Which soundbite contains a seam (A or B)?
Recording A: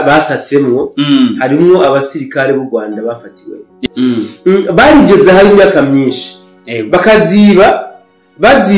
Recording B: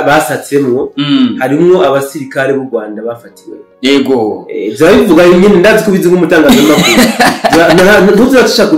A